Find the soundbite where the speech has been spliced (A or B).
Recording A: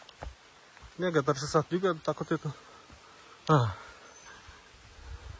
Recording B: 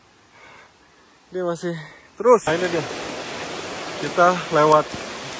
B